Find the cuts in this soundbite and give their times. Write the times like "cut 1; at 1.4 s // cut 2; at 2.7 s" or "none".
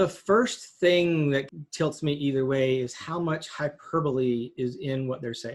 cut 1; at 1.5 s